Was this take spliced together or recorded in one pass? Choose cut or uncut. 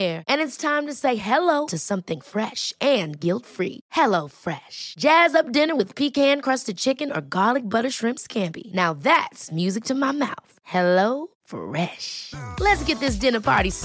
uncut